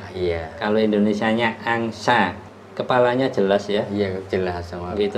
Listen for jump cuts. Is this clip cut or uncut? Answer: uncut